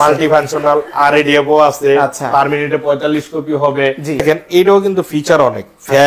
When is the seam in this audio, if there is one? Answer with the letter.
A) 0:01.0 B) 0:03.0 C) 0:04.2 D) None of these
C